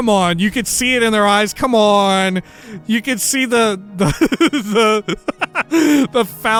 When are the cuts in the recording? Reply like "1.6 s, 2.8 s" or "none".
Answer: none